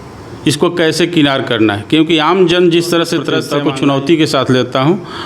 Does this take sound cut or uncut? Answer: cut